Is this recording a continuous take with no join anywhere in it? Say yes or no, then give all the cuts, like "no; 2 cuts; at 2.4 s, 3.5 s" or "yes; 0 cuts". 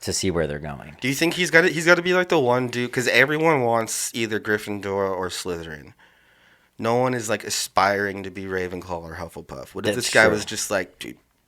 yes; 0 cuts